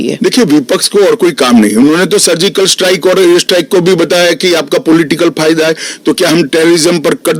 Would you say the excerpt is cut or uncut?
uncut